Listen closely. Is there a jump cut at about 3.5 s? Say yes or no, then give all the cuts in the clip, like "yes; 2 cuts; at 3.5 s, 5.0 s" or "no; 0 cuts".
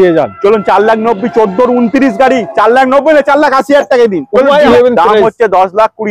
no; 1 cut; at 4.7 s